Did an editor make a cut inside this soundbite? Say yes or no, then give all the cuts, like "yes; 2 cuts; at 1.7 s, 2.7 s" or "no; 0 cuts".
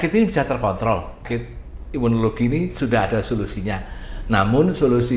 yes; 1 cut; at 1.3 s